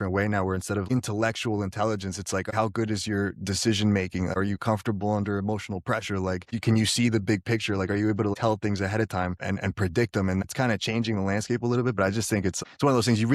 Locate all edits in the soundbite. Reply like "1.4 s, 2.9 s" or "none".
0.8 s, 2.5 s, 9.4 s, 10.4 s